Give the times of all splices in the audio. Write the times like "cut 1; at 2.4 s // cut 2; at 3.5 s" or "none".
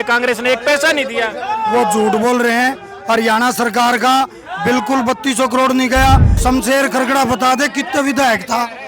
cut 1; at 6.3 s